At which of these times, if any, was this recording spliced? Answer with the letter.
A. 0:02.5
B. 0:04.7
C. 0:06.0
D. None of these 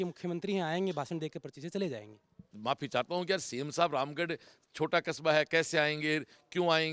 A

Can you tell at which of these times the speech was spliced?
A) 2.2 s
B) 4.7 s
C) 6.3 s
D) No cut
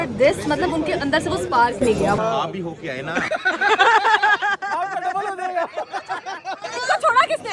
A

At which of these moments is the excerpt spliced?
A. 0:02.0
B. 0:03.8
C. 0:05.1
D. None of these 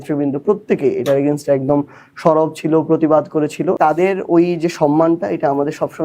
B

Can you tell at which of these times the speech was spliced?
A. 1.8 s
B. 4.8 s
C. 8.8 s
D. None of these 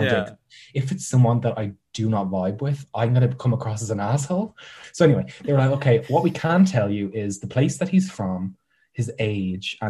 B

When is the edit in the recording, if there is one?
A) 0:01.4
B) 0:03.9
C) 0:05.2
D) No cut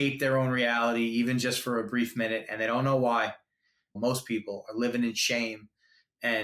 B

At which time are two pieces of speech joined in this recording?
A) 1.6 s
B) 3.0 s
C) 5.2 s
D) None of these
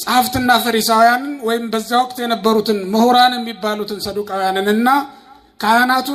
D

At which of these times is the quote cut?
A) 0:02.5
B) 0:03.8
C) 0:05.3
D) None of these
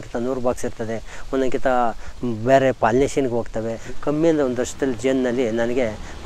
B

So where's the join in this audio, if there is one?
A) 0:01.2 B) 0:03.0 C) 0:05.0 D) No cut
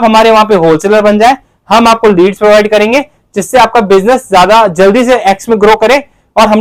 D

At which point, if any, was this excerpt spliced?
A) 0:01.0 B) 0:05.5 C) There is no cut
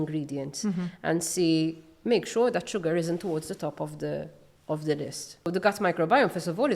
B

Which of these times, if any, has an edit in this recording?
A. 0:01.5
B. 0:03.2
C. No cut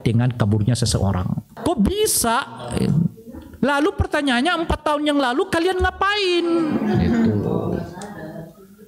A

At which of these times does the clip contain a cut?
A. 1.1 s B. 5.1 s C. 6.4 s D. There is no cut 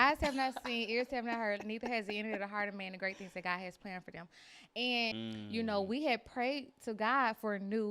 B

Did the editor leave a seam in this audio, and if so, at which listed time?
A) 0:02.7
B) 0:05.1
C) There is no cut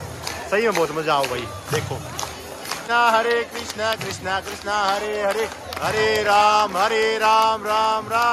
A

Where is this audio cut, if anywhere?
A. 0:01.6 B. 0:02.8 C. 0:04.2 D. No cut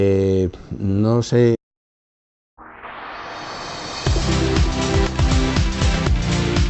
D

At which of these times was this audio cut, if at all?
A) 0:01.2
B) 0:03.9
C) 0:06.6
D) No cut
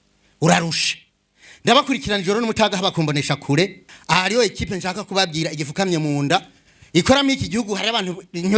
B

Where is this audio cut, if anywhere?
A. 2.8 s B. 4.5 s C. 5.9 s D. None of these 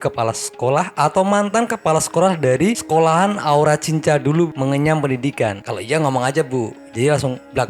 D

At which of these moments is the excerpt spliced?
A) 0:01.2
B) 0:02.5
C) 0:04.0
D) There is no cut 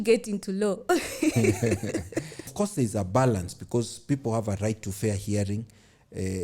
B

